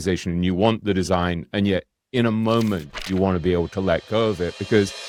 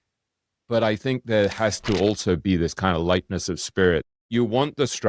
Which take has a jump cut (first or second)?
second